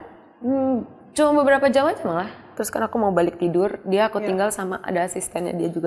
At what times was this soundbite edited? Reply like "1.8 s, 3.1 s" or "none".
2.6 s

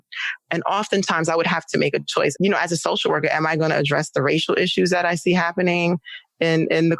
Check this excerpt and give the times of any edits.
2.3 s

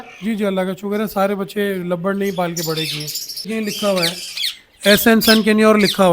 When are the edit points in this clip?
3.5 s

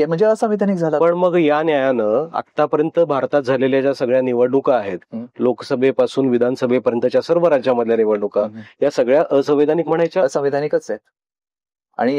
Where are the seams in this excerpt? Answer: none

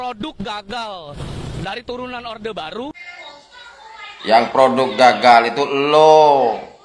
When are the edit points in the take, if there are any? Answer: none

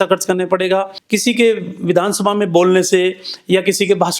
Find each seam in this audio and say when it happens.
1.0 s

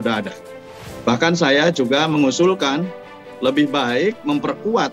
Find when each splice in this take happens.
none

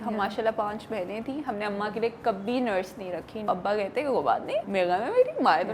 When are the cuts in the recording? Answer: 3.5 s, 4.7 s

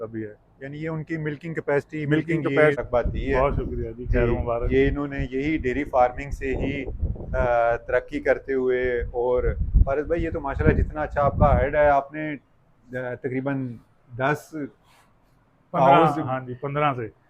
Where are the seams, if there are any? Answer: 2.8 s

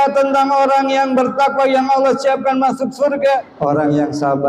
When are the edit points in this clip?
3.5 s

